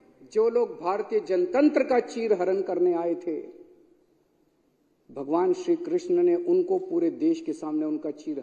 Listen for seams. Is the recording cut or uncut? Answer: uncut